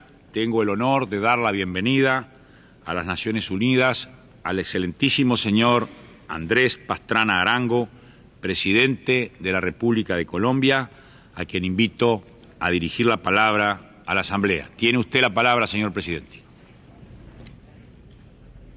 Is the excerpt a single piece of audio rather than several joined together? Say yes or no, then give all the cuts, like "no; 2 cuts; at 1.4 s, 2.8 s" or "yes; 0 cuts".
yes; 0 cuts